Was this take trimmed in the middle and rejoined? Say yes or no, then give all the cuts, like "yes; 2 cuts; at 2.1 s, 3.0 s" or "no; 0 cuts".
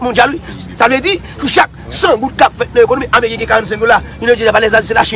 no; 0 cuts